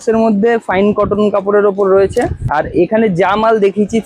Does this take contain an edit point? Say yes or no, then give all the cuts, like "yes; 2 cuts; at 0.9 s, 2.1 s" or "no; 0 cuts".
yes; 1 cut; at 2.4 s